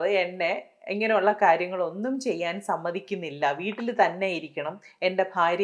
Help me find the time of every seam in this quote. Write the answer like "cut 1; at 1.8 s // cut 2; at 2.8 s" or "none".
none